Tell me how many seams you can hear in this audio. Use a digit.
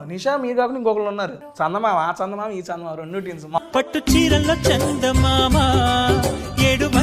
2